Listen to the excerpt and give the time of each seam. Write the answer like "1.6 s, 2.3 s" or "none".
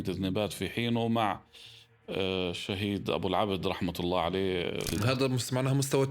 4.9 s

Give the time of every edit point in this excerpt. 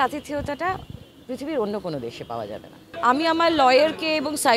2.8 s

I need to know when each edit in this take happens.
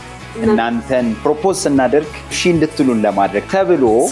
2.4 s

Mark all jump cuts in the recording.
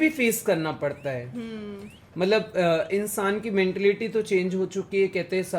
none

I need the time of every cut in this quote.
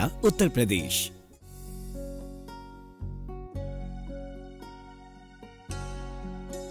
0.9 s

